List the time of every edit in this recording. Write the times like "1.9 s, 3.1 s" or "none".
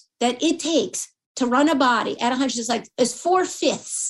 2.9 s